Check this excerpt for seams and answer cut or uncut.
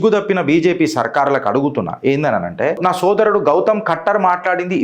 cut